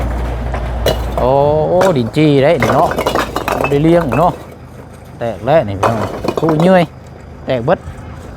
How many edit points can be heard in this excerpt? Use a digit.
1